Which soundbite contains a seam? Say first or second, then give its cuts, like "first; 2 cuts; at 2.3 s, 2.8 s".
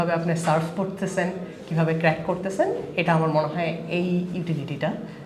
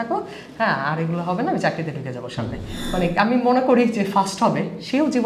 second; 1 cut; at 2.8 s